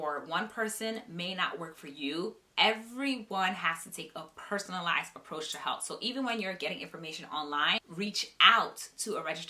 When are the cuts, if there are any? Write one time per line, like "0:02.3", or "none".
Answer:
0:07.8